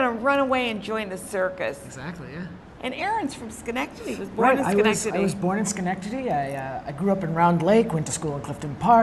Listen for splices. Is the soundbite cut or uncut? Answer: cut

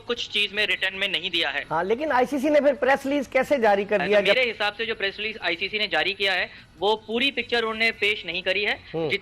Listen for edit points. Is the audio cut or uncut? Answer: cut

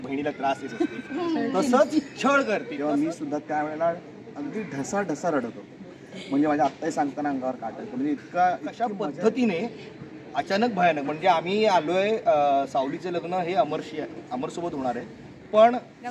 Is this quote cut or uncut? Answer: cut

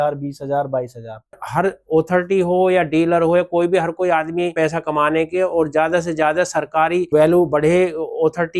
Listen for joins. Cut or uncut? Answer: cut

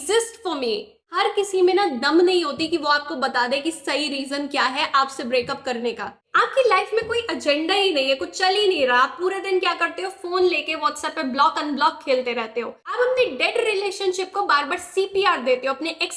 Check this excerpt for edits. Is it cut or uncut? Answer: cut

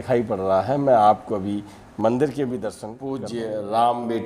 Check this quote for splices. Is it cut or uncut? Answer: cut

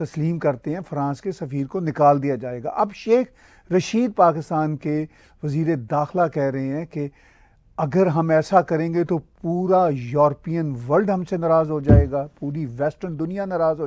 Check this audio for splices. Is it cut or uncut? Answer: uncut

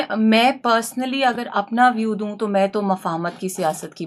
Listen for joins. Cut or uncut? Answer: uncut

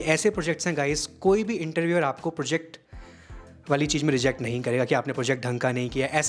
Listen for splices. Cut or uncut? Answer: uncut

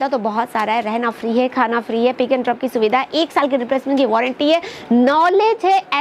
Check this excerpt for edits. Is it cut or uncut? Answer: uncut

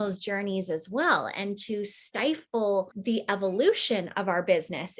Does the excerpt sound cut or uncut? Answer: cut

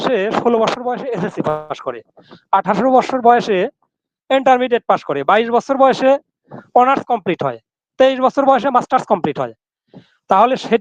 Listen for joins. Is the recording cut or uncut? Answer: uncut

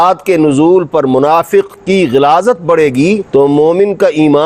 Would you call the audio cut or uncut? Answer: uncut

